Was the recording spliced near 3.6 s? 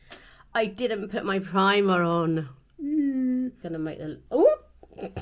yes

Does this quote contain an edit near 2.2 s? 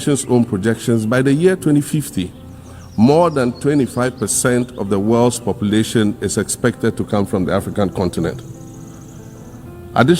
no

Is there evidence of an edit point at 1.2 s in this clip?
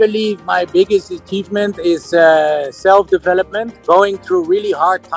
no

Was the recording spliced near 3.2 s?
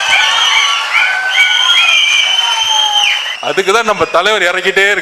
yes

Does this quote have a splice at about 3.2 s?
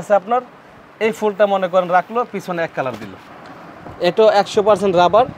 yes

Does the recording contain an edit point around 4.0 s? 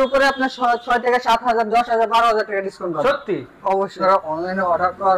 yes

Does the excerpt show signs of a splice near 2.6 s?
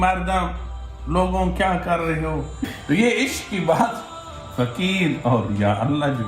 yes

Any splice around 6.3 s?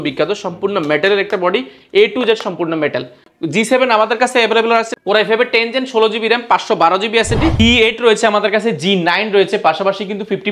no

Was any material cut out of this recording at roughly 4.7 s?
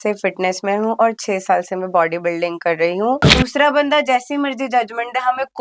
no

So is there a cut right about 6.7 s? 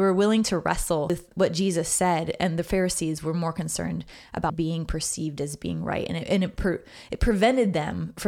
no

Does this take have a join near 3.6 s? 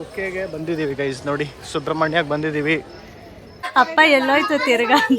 yes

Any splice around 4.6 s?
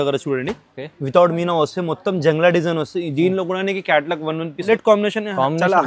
yes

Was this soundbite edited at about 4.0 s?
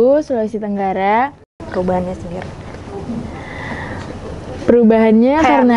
no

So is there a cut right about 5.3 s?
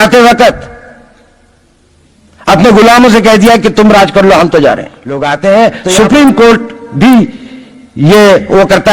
yes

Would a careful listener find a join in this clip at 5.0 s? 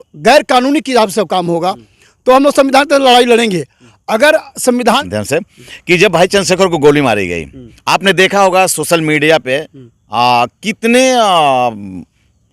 yes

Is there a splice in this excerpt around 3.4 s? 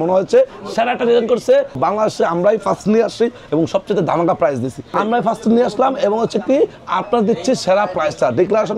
no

